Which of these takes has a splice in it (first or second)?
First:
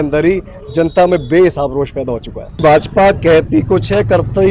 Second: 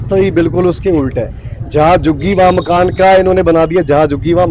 first